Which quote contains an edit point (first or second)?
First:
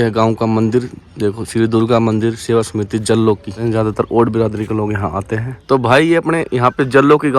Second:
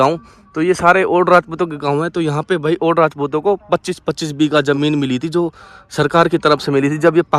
first